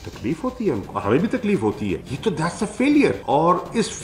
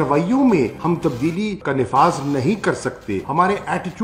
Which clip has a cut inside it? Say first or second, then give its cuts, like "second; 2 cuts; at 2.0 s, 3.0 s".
first; 2 cuts; at 0.9 s, 2.0 s